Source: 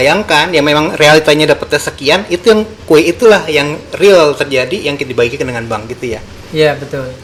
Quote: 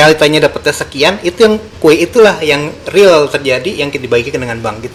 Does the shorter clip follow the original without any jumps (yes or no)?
yes